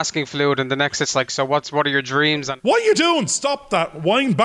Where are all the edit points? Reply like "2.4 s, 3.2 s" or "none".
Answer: 2.5 s